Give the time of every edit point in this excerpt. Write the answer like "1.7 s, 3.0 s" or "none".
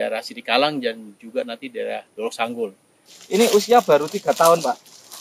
3.1 s